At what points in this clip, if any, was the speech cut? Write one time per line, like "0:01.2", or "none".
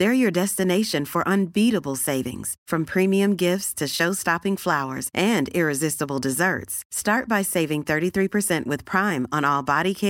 none

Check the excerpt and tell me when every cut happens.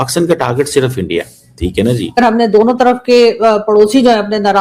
0:02.2

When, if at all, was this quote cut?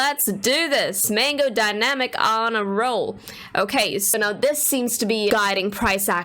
0:05.3

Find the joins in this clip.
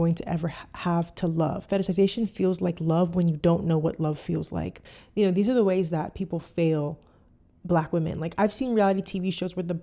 0:04.8

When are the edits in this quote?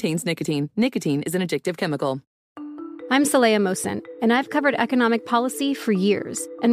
0:02.3

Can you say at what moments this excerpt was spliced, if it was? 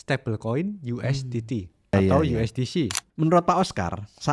0:01.9
0:03.0

